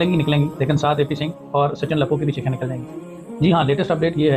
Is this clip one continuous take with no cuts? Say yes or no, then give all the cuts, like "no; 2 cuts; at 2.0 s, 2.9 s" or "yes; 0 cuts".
yes; 0 cuts